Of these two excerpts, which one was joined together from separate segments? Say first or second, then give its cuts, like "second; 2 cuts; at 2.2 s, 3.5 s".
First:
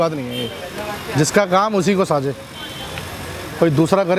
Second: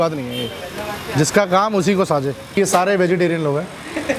second; 1 cut; at 2.6 s